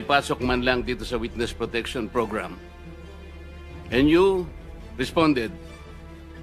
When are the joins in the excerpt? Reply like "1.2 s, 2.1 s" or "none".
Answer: 2.6 s, 3.9 s